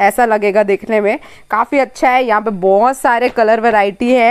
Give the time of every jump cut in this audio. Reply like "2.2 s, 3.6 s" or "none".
none